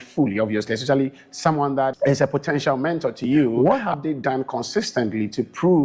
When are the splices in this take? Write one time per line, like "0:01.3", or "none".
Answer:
0:01.9
0:03.6